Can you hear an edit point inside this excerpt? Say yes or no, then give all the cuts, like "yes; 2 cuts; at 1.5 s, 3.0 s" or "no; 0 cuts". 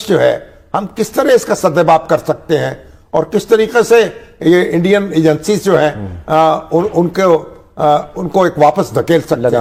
no; 0 cuts